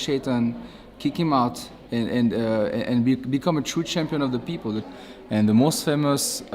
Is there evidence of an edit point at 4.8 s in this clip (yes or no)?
yes